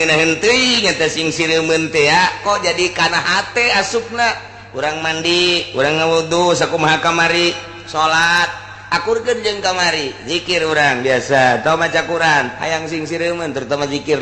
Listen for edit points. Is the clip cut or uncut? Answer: uncut